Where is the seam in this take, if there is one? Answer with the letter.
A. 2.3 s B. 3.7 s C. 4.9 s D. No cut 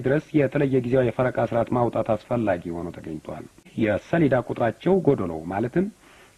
B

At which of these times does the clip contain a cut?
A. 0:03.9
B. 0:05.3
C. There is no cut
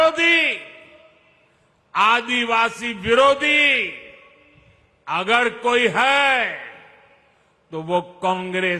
C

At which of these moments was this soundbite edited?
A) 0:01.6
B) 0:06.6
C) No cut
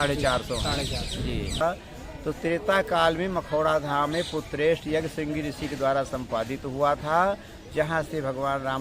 A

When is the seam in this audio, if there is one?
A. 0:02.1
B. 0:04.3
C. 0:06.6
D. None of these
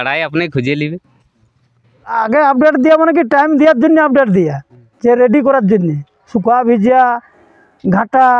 A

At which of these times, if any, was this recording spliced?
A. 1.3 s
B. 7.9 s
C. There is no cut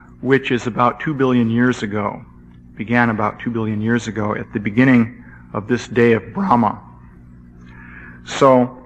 C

